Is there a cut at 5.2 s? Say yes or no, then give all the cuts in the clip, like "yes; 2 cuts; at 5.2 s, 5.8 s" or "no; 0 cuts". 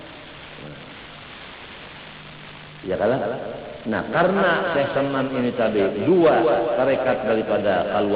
no; 0 cuts